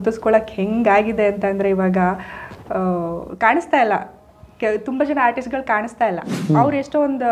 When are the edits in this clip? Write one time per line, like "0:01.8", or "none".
0:06.3